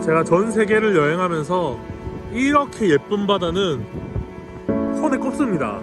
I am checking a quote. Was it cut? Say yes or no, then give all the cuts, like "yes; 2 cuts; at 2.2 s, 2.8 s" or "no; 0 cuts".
no; 0 cuts